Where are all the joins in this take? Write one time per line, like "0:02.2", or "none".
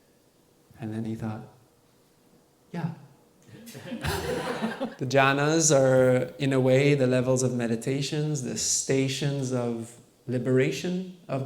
0:04.7